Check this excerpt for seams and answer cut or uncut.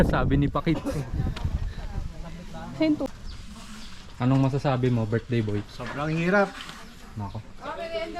cut